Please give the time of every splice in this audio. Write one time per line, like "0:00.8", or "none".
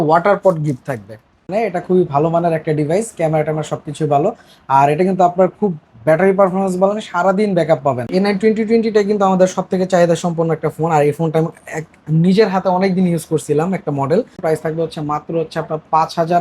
0:01.5
0:08.0
0:14.4